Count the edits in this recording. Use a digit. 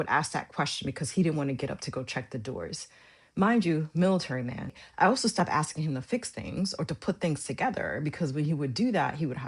1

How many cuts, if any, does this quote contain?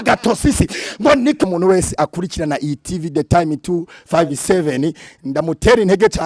1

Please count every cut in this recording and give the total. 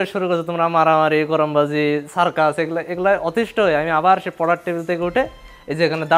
0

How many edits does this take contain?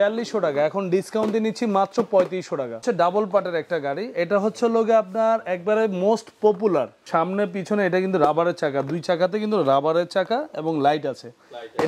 2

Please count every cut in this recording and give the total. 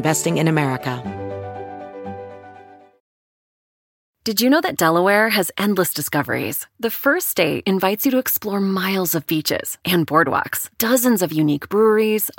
1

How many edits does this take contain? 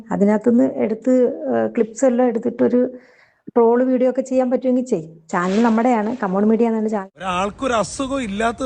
1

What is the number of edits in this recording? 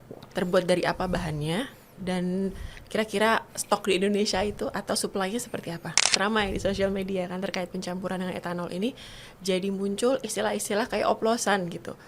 1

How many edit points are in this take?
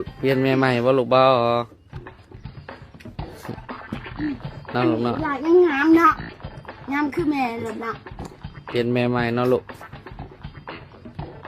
1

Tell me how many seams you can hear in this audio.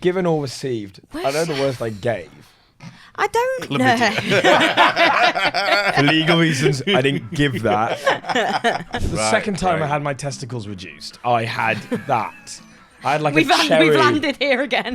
1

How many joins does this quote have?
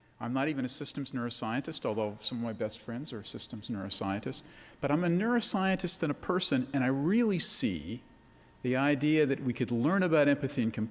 1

